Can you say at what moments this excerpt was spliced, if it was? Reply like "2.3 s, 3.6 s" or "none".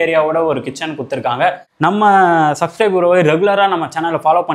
1.7 s